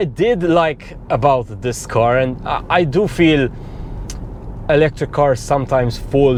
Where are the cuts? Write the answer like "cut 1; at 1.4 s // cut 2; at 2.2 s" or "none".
none